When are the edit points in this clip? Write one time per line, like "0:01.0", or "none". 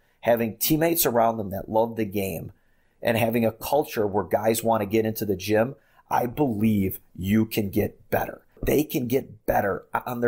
0:08.6